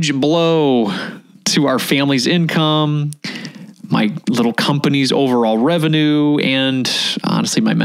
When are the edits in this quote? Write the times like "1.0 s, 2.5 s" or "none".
none